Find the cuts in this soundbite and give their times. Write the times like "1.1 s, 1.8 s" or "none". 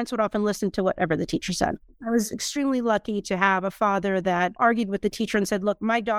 1.9 s, 4.5 s